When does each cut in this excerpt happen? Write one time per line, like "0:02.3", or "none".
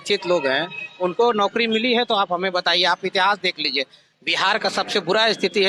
none